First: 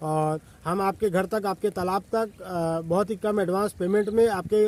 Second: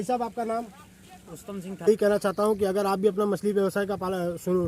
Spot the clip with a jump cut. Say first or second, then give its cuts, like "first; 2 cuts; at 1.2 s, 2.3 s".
second; 1 cut; at 1.9 s